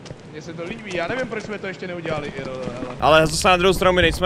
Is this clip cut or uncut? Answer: cut